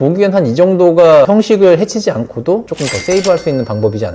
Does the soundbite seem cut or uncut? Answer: cut